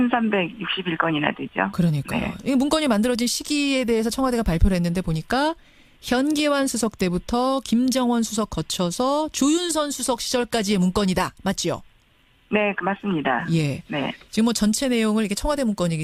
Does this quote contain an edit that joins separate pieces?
yes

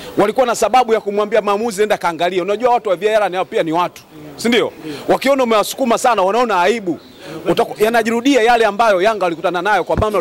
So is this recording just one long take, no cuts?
yes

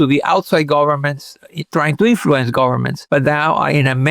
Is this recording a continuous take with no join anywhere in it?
no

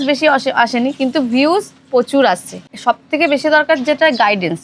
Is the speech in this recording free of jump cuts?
no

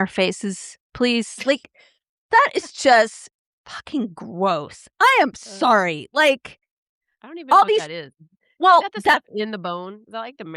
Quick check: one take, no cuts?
yes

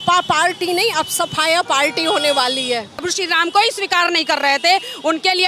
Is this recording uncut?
no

